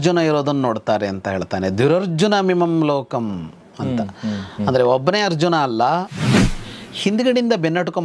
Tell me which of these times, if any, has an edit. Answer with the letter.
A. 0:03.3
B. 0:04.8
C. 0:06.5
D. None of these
C